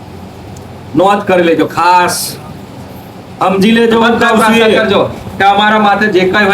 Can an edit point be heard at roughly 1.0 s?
no; 1 cut; at 4.8 s

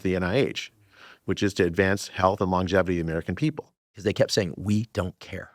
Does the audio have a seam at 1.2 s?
no; 1 cut; at 4.0 s

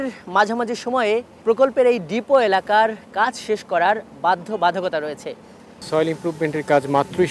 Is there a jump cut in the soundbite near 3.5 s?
no; 2 cuts; at 1.3 s, 5.9 s

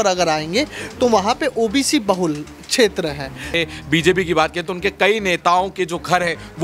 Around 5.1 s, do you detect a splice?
no; 1 cut; at 3.5 s

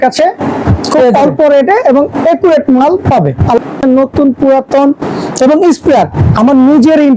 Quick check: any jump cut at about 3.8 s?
yes; 1 cut; at 3.8 s

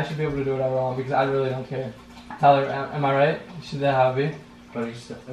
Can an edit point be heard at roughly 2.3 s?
yes; 1 cut; at 2.3 s

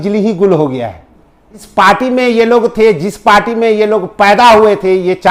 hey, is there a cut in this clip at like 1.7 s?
yes; 1 cut; at 1.7 s

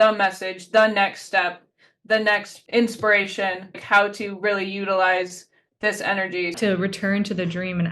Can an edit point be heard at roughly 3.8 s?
yes; 3 cuts; at 2.5 s, 3.8 s, 6.6 s

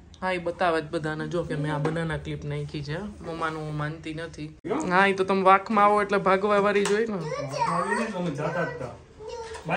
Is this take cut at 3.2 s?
no; 1 cut; at 4.6 s

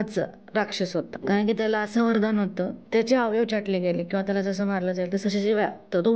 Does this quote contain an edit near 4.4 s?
no; 2 cuts; at 1.2 s, 2.8 s

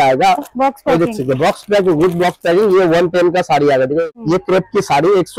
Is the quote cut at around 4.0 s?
yes; 1 cut; at 4.0 s

